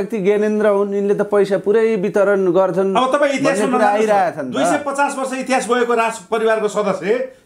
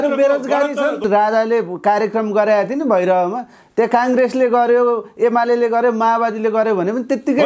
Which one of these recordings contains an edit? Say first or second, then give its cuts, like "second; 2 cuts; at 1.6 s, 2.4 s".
second; 1 cut; at 1.0 s